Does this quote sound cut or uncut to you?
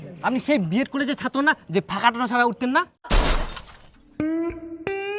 uncut